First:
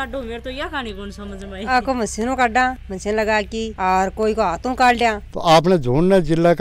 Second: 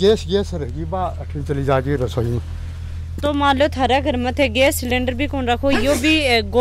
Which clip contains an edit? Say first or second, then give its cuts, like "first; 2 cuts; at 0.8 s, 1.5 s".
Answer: first; 1 cut; at 5.3 s